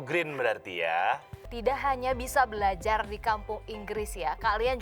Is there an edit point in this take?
yes; 1 cut; at 1.5 s

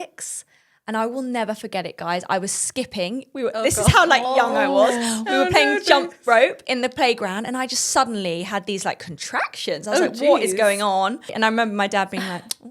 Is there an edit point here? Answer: yes; 1 cut; at 11.3 s

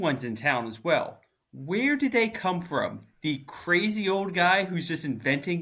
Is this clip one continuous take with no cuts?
yes; 0 cuts

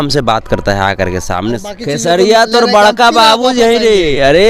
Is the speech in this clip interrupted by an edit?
yes; 1 cut; at 1.9 s

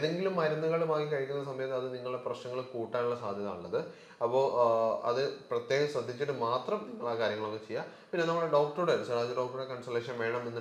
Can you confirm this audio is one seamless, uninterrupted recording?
yes; 0 cuts

